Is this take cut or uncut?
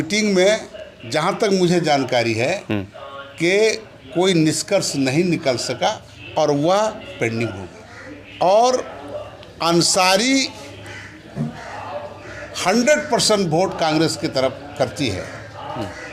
uncut